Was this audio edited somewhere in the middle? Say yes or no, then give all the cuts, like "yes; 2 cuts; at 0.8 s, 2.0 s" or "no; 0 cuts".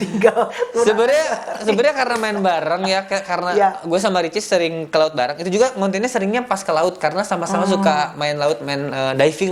no; 0 cuts